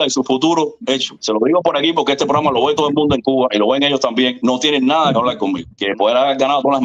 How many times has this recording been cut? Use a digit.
2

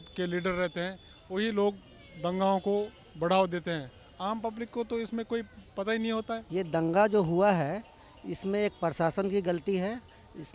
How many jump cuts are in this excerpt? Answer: 1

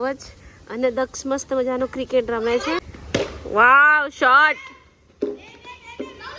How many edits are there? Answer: 1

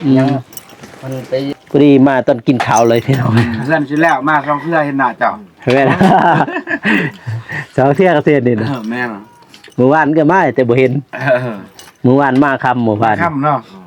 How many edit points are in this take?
1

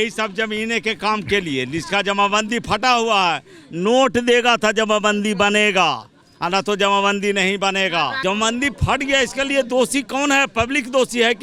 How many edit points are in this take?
1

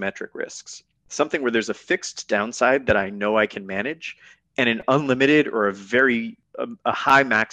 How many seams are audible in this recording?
1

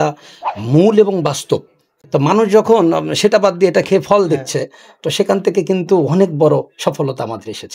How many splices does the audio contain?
1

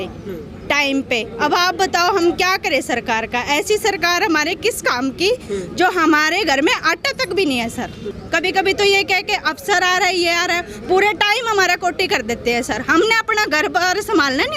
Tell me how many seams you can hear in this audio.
1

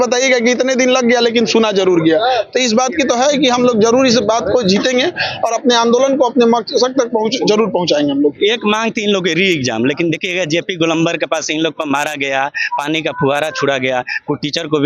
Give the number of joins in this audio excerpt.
0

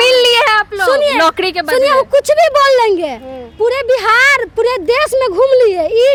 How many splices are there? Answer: 0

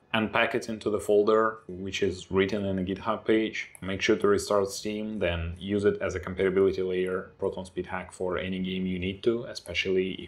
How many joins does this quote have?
0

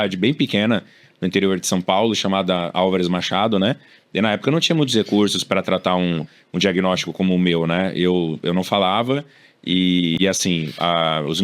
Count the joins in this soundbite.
1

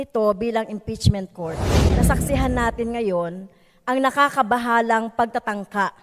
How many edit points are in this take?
1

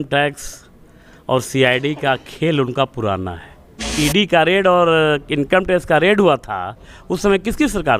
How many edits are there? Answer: 1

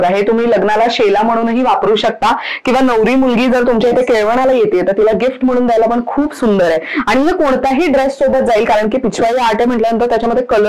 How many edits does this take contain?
0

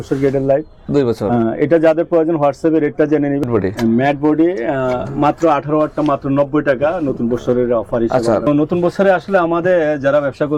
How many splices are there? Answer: 2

